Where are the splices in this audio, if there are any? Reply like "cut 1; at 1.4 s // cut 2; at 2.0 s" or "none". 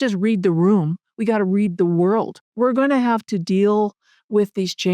cut 1; at 2.5 s